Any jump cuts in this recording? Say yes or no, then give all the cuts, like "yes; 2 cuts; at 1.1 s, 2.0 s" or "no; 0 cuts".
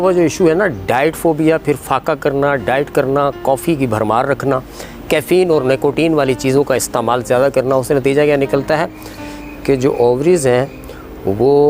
no; 0 cuts